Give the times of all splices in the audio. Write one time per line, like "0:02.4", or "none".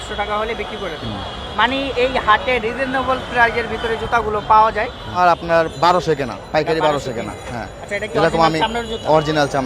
0:05.1